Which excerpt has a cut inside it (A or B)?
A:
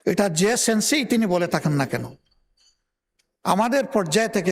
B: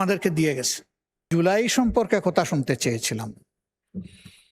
B